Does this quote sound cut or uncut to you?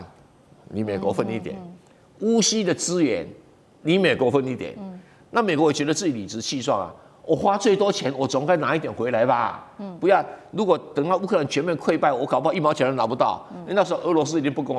uncut